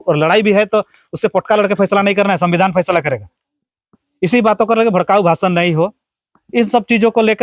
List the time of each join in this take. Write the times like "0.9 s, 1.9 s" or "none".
none